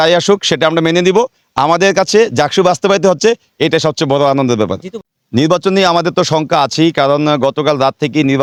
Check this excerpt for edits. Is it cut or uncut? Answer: uncut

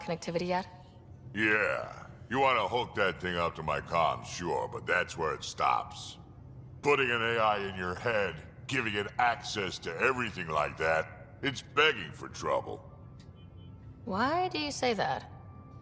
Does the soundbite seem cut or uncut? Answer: cut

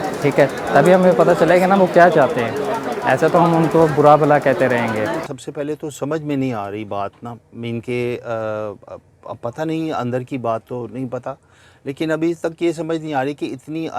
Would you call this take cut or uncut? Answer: cut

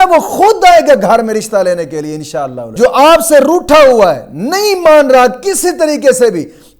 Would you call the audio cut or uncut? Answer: cut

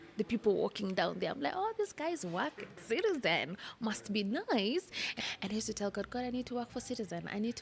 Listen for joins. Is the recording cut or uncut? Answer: cut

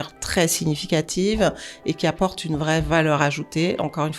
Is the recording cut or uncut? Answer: uncut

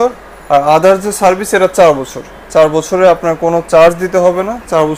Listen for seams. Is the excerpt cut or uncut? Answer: uncut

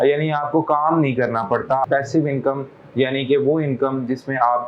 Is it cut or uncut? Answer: cut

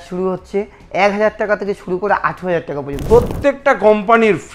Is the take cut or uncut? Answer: cut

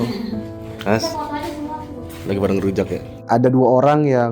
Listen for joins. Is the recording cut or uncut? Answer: cut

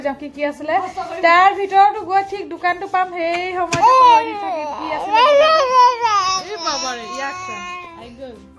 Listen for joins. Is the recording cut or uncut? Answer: uncut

